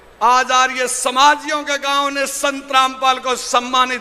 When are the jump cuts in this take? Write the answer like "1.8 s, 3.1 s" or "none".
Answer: none